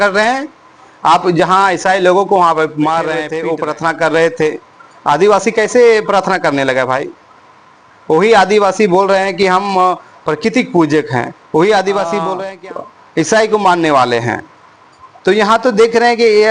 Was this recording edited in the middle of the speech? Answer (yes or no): yes